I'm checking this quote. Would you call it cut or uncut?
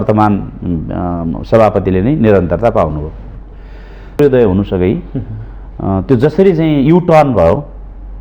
cut